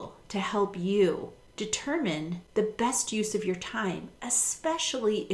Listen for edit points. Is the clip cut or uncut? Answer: cut